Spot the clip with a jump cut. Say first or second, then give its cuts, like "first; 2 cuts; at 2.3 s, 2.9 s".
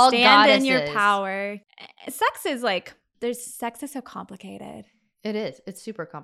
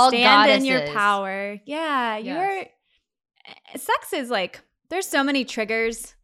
first; 2 cuts; at 1.6 s, 3.0 s